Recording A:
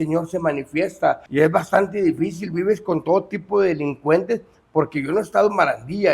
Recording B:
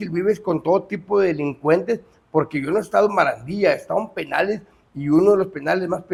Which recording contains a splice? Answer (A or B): A